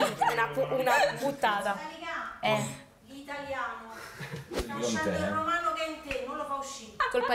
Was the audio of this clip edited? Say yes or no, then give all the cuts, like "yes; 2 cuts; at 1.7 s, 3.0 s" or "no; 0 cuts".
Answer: no; 0 cuts